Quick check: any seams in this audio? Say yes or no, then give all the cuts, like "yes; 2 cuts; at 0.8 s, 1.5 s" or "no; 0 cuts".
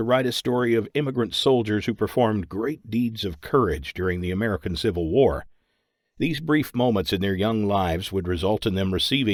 no; 0 cuts